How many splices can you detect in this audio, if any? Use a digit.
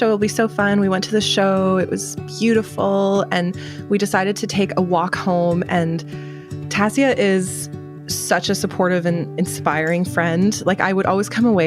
0